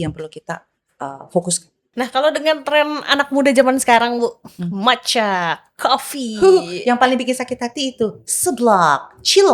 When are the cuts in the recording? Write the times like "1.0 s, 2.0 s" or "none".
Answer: 1.7 s